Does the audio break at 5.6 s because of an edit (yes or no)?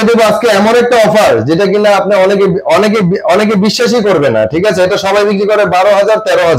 no